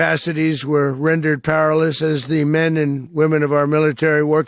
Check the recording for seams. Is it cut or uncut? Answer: cut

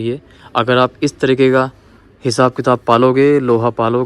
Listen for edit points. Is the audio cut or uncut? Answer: uncut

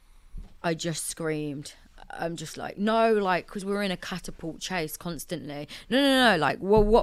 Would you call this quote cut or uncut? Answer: uncut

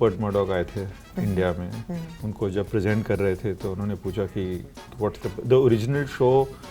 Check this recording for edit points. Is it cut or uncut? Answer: uncut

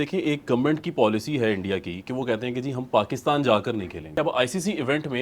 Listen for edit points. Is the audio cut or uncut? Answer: cut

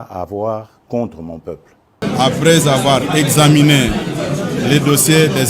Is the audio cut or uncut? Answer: cut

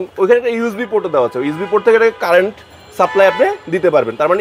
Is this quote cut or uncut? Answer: uncut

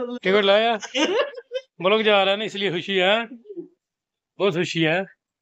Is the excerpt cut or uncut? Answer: uncut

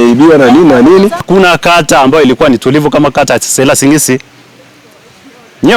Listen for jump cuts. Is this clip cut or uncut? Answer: cut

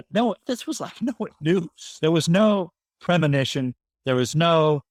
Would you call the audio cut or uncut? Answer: uncut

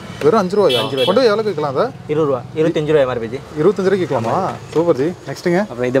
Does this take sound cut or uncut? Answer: uncut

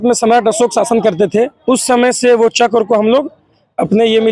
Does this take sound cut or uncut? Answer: uncut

